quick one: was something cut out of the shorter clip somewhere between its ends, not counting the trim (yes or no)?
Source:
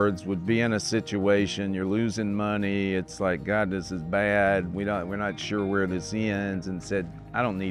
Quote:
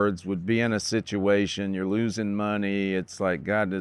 no